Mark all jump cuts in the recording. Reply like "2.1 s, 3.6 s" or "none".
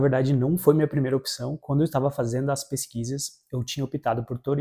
none